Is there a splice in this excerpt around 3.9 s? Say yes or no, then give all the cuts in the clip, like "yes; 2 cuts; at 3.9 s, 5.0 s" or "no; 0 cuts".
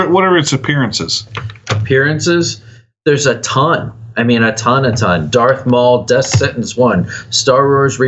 no; 0 cuts